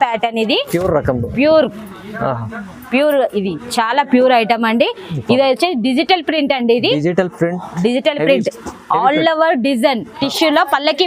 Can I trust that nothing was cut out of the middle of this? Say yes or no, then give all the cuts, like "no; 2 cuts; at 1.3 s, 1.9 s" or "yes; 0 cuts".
no; 1 cut; at 10.1 s